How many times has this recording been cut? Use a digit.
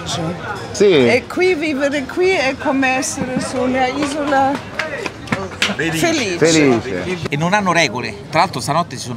2